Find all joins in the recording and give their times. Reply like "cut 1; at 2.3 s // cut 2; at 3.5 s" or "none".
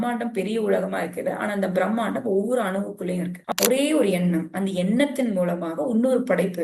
cut 1; at 3.4 s